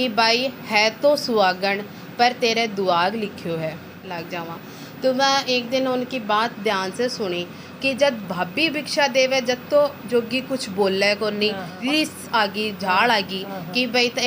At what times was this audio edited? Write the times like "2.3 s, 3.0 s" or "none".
4.2 s, 11.7 s